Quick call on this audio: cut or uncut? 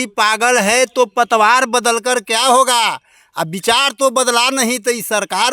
uncut